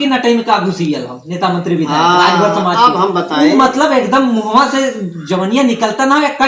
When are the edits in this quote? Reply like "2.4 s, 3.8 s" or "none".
none